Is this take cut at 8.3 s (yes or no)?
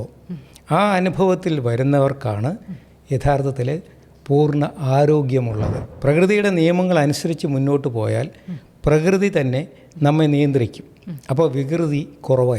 no